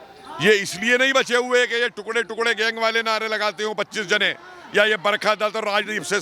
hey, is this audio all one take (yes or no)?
yes